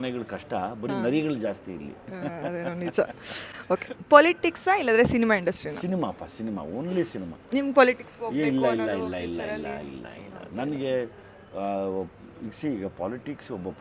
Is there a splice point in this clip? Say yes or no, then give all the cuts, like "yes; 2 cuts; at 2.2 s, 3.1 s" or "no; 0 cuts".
no; 0 cuts